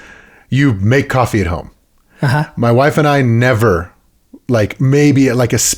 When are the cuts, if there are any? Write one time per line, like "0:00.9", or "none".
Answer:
none

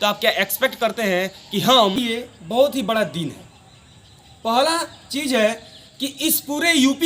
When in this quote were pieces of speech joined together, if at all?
0:02.0

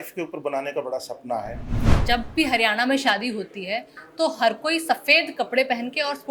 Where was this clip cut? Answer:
0:01.9

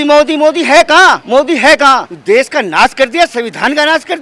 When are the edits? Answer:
0:01.2
0:02.1

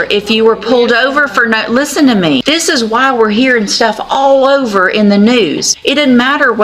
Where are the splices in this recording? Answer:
0:02.4
0:05.7

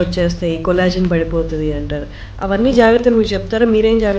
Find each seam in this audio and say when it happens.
none

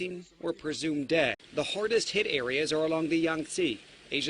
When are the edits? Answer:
0:01.4

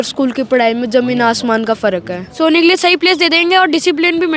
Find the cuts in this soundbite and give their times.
0:02.2

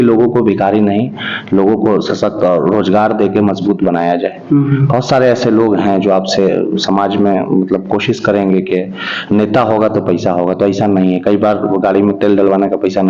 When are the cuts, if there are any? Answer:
none

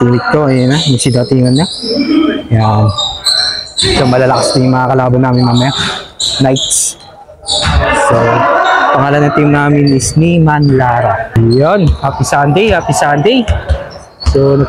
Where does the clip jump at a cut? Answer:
0:11.3

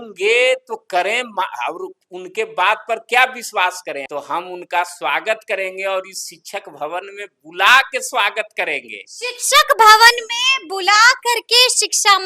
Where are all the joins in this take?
0:03.9

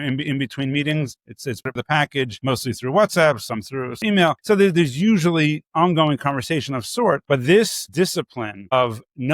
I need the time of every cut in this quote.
0:02.4
0:04.4
0:07.2

